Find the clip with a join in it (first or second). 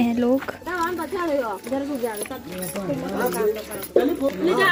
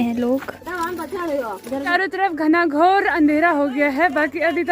second